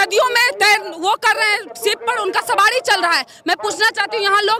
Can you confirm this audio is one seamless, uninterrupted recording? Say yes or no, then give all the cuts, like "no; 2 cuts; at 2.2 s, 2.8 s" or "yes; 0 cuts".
yes; 0 cuts